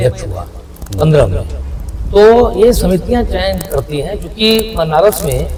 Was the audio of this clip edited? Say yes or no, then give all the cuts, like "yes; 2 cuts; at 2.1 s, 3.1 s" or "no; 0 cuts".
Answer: no; 0 cuts